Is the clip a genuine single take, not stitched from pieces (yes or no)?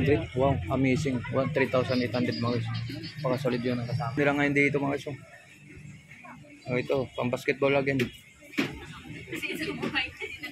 no